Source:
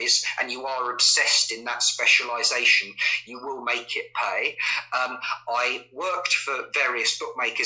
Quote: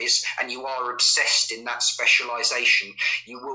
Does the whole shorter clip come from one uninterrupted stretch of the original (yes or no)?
yes